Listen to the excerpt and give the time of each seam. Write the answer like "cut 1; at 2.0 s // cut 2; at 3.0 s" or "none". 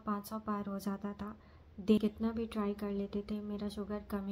cut 1; at 2.0 s